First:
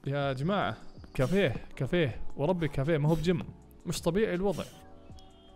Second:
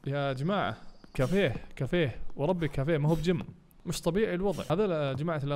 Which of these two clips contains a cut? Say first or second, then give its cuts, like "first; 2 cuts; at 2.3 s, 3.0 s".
second; 1 cut; at 4.6 s